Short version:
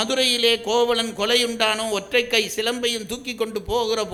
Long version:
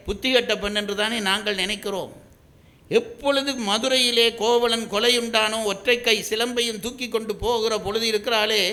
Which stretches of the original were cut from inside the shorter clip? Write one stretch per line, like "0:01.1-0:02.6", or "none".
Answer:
none